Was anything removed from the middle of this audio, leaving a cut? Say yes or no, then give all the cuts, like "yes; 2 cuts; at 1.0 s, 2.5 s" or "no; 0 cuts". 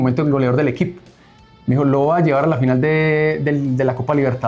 no; 0 cuts